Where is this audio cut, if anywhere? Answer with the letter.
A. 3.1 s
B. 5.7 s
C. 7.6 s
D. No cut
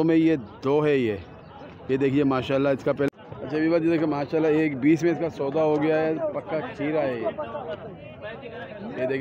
A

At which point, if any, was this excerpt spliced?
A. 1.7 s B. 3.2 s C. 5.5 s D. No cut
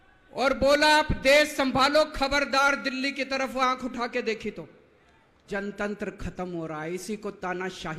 C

